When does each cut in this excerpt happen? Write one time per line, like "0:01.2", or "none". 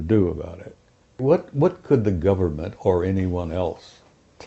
0:01.2